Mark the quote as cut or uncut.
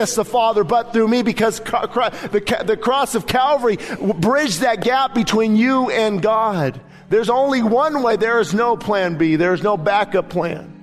uncut